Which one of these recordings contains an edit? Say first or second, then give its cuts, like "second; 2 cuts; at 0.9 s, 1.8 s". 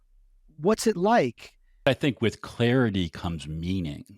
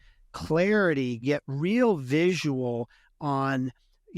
first; 1 cut; at 1.8 s